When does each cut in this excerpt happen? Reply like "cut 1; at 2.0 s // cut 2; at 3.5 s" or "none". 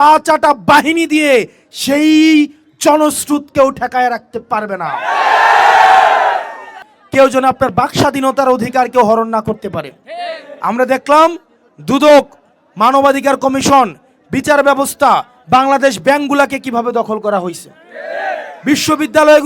cut 1; at 6.7 s